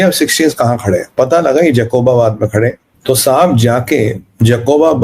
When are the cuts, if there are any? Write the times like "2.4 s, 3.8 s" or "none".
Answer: 2.9 s